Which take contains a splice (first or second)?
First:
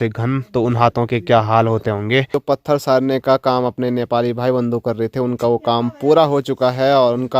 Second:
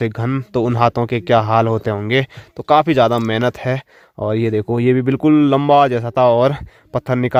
first